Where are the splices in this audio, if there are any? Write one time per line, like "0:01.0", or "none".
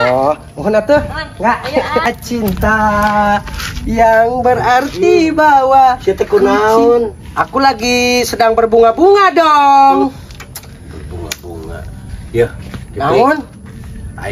0:02.1